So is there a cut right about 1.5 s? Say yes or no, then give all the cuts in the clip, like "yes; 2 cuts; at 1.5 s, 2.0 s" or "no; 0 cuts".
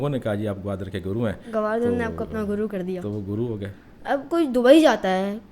no; 0 cuts